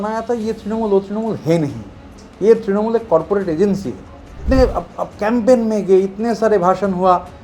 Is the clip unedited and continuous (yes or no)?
no